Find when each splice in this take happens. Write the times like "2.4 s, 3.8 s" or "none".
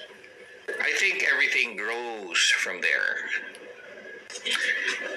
3.9 s